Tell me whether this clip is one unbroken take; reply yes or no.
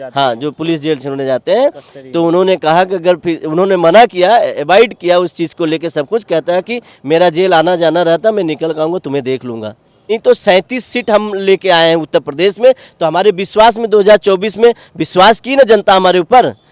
no